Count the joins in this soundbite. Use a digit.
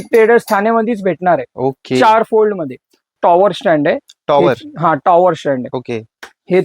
1